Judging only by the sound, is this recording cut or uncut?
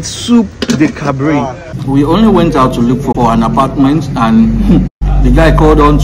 cut